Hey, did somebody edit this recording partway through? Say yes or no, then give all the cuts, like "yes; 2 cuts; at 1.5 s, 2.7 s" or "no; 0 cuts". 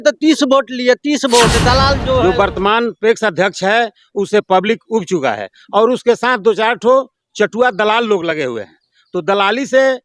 yes; 1 cut; at 2.2 s